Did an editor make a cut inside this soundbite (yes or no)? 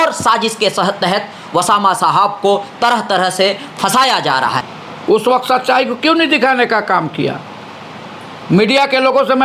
yes